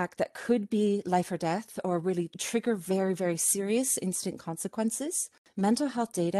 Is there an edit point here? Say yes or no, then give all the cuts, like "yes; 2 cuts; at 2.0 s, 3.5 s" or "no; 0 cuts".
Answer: yes; 2 cuts; at 2.4 s, 5.5 s